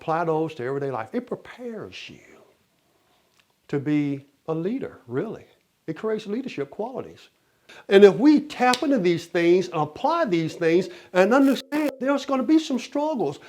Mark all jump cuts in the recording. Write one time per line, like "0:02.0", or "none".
0:07.7